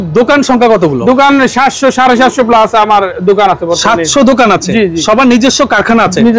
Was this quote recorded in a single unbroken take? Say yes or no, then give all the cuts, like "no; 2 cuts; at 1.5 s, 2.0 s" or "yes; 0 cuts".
yes; 0 cuts